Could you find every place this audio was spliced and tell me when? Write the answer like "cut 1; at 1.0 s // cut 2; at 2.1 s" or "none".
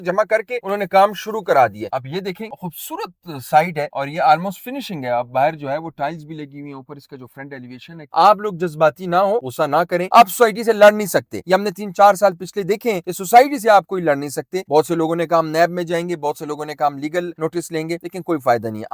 cut 1; at 1.8 s // cut 2; at 3.9 s // cut 3; at 8.0 s // cut 4; at 10.1 s